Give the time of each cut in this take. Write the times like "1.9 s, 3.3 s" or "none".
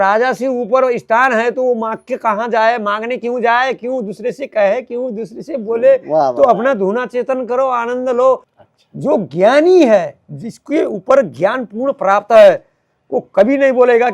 8.5 s